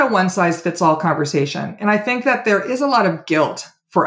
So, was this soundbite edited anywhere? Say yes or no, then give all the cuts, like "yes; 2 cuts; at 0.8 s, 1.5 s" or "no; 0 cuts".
no; 0 cuts